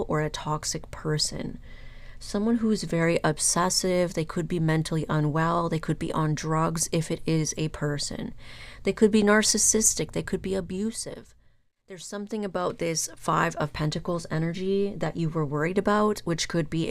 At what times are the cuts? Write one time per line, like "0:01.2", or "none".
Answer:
0:12.0